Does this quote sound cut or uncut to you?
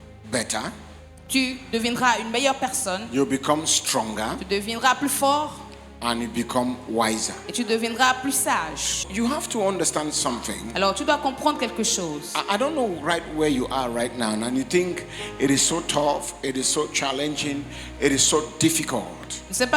cut